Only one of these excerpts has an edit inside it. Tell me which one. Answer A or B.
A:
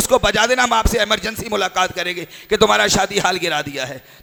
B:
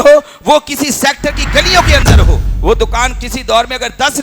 B